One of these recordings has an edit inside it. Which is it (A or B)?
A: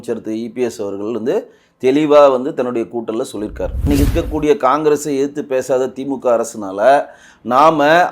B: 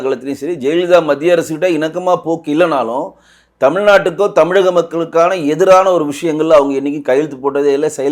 A